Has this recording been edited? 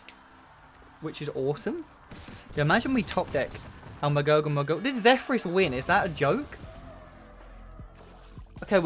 no; 0 cuts

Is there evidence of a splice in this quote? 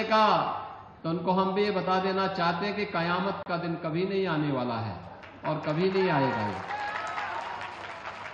no; 0 cuts

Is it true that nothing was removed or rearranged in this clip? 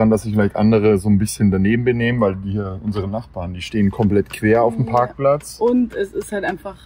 yes; 0 cuts

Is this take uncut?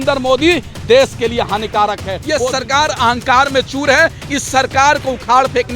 no; 1 cut; at 2.1 s

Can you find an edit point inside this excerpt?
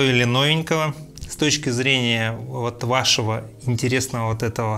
no; 0 cuts

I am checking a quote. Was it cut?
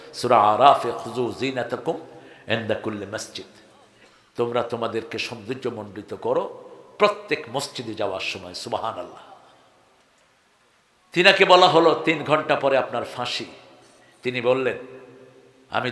no; 0 cuts

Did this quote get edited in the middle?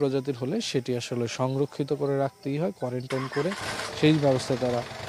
no; 0 cuts

